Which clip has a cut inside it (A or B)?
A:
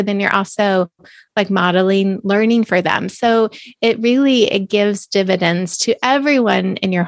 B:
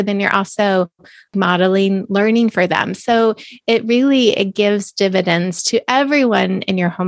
B